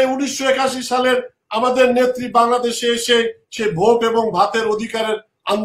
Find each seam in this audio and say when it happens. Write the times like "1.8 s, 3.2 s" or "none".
none